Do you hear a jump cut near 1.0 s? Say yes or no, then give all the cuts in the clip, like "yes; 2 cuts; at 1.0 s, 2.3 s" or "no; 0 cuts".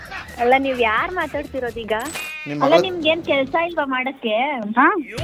no; 1 cut; at 2.2 s